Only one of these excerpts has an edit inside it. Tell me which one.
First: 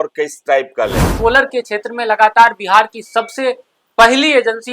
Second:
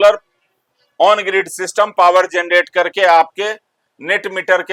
first; 1 cut; at 1.0 s

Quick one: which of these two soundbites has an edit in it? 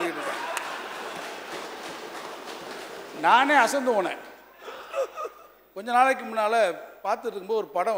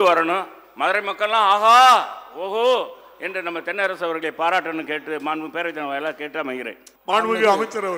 second; 1 cut; at 6.8 s

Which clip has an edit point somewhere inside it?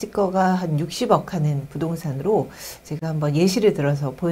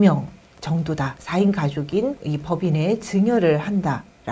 second; 2 cuts; at 1.1 s, 2.3 s

